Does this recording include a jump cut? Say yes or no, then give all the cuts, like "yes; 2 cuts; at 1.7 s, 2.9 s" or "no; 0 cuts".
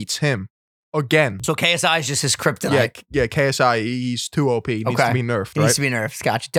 yes; 1 cut; at 1.4 s